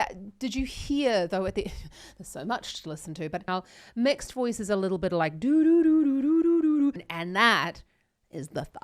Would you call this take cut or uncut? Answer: cut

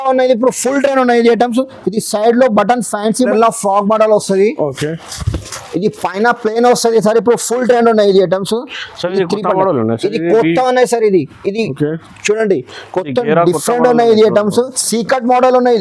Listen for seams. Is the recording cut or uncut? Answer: cut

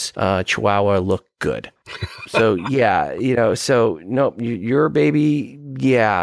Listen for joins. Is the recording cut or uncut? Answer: cut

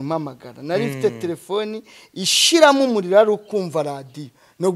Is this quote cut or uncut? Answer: uncut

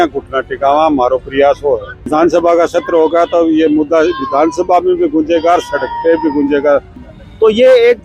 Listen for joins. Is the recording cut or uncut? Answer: cut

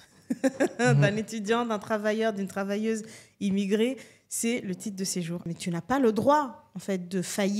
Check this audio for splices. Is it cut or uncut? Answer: cut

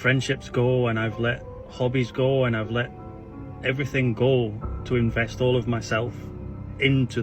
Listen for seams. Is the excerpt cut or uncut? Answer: uncut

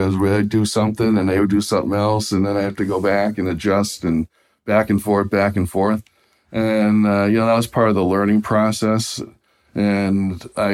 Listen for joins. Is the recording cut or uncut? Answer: uncut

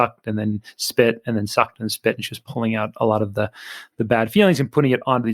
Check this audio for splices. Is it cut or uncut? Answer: uncut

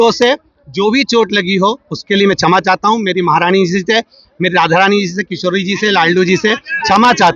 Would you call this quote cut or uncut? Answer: uncut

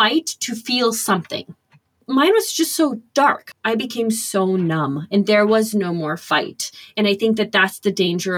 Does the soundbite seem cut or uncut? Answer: cut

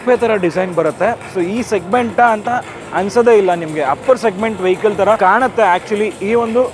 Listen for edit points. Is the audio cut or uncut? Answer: cut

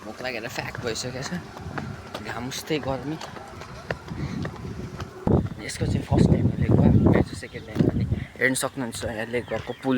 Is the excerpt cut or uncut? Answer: cut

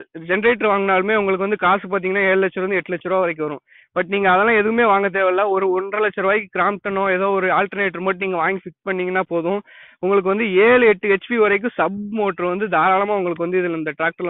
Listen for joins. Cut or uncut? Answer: uncut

